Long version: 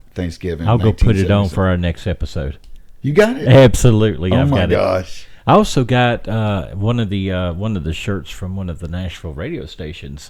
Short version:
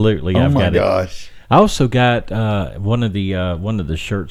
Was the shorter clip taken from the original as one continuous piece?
yes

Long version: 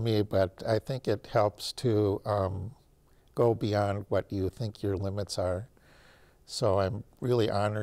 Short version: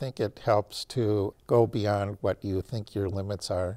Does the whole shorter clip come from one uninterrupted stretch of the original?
no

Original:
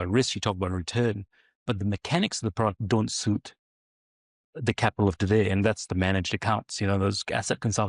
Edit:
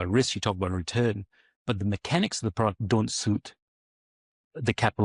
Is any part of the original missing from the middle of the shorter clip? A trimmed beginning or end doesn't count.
no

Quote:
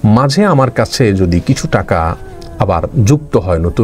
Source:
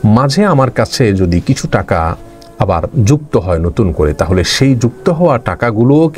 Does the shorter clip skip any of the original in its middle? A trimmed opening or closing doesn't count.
no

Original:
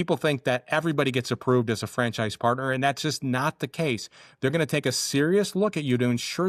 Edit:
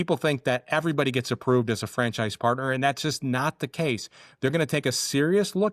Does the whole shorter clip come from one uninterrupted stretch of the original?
yes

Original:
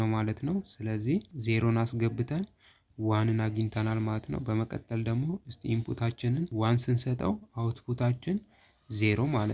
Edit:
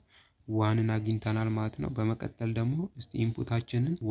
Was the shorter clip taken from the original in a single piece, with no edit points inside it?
yes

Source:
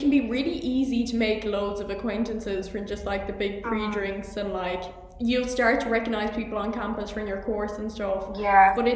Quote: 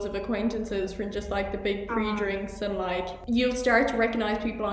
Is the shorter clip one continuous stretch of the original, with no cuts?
no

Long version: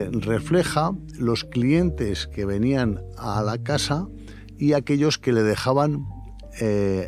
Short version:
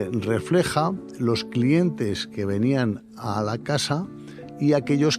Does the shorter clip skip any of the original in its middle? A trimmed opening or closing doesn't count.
no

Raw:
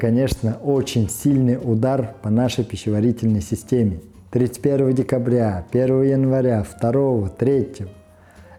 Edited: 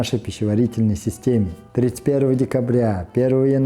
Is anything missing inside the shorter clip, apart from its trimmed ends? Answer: yes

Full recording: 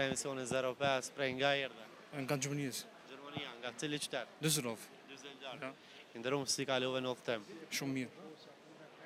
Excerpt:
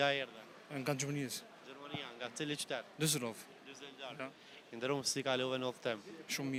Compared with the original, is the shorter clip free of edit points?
yes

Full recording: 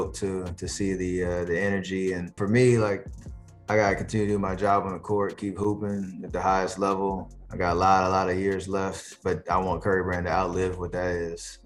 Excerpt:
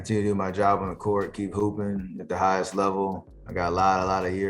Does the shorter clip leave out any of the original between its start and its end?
no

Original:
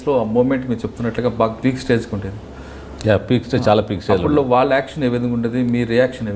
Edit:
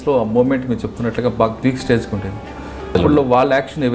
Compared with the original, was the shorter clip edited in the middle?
yes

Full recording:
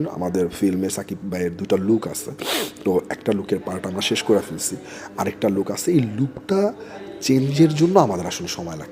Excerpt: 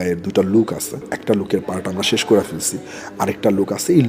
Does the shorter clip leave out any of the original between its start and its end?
yes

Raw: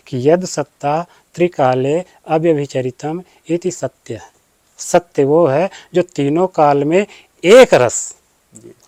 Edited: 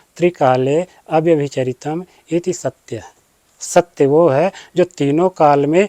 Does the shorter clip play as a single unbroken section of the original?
yes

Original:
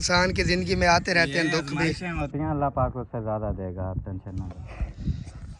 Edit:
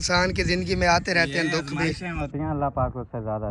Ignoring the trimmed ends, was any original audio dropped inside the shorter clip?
no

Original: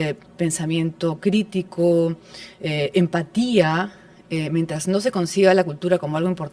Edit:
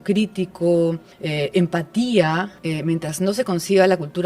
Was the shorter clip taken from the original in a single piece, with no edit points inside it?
no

